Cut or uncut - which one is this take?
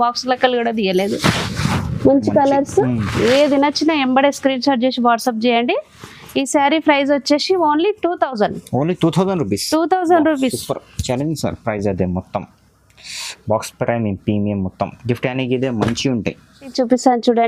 uncut